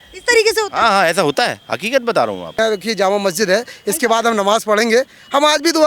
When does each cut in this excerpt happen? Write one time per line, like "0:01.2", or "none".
0:02.6